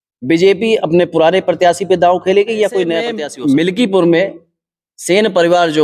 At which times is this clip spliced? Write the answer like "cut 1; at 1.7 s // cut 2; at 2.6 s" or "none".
cut 1; at 3.2 s